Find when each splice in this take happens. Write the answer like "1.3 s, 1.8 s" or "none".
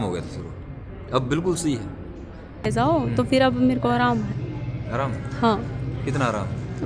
2.7 s